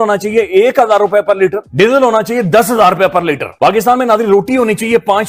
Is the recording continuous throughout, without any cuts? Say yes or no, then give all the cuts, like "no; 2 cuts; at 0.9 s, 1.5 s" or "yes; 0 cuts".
yes; 0 cuts